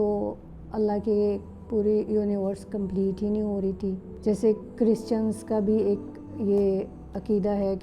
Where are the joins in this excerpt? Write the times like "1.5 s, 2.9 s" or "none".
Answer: 4.1 s